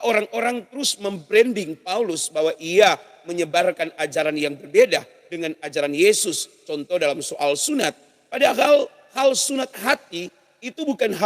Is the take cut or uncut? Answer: uncut